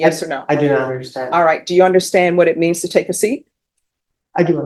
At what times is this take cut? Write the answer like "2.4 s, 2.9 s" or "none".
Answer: none